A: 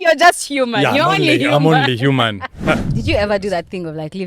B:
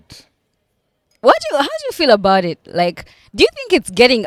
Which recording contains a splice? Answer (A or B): A